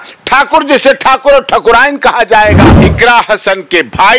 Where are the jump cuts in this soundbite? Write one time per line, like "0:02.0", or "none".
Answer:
0:02.6

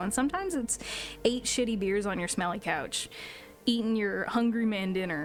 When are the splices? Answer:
none

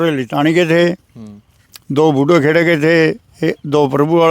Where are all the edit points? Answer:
none

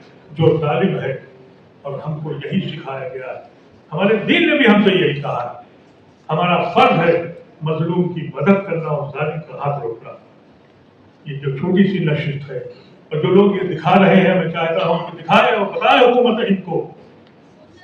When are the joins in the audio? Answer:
none

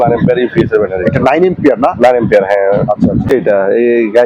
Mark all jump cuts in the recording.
0:03.3

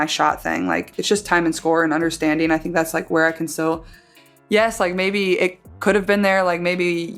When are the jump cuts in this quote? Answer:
0:04.2

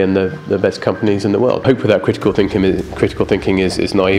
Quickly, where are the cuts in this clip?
0:01.6

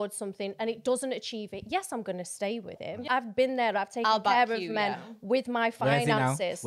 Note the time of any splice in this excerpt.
0:03.0

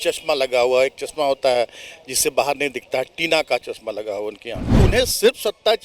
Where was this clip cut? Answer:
0:04.8

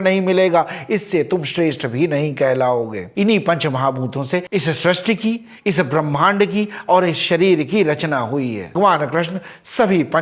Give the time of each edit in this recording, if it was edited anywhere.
0:03.1
0:08.7

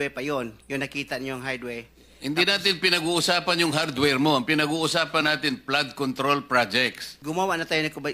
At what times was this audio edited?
0:07.1

